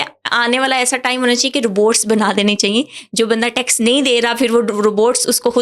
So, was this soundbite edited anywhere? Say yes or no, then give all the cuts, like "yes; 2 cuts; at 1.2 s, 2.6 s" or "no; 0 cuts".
no; 0 cuts